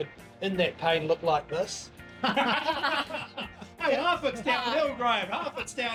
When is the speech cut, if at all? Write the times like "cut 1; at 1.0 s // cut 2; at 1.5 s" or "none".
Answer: none